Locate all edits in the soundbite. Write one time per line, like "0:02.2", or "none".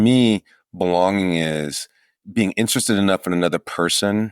0:02.2